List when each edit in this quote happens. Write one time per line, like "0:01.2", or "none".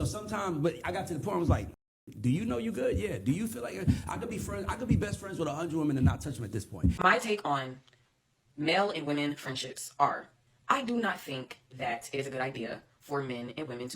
0:07.0